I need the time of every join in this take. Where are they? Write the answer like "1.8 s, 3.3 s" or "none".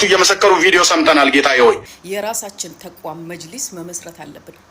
1.9 s